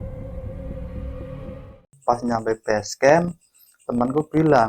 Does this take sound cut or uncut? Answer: cut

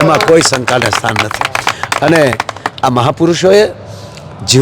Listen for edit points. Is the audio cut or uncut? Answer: uncut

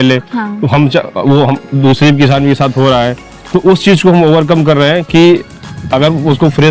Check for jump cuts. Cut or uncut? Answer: uncut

